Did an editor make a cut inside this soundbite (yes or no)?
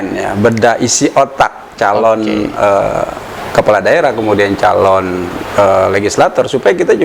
no